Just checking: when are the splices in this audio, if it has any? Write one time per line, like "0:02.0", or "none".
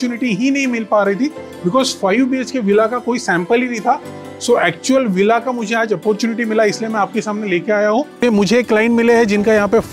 0:08.2